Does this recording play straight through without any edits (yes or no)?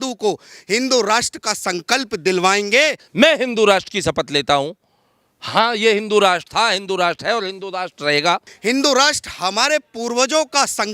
no